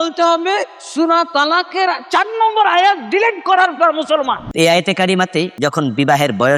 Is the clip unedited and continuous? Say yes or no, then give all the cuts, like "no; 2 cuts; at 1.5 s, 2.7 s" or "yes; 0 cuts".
no; 2 cuts; at 4.5 s, 5.5 s